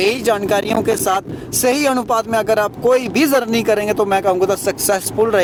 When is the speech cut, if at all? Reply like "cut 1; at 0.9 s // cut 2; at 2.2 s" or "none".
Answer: none